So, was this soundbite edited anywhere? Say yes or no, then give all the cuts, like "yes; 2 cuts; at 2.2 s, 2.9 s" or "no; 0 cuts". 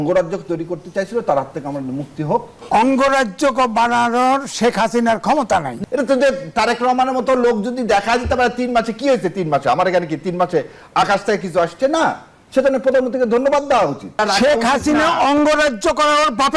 yes; 3 cuts; at 2.6 s, 5.7 s, 14.2 s